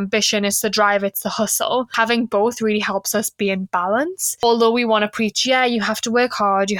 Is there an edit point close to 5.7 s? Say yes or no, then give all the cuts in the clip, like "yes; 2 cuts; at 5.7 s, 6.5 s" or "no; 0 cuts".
no; 2 cuts; at 1.9 s, 4.4 s